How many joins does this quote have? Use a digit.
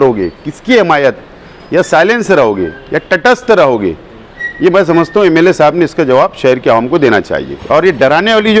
1